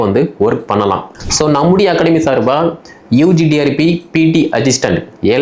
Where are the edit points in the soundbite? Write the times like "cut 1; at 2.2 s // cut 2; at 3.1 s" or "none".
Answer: cut 1; at 1.1 s